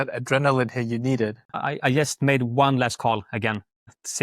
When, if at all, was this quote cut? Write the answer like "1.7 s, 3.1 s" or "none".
1.5 s